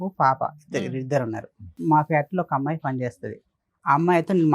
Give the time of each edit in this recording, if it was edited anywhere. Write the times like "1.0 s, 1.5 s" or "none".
1.8 s